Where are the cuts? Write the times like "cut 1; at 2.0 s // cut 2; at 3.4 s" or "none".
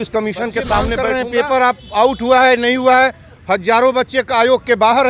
cut 1; at 1.0 s